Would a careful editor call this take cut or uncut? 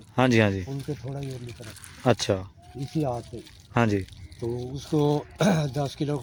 uncut